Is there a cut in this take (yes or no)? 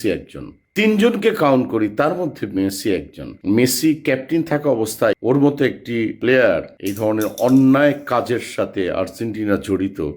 yes